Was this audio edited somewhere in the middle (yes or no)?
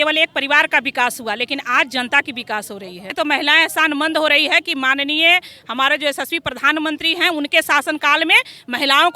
yes